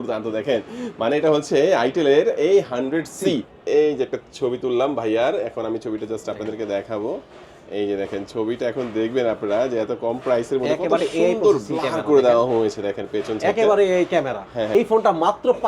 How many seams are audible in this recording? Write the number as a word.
two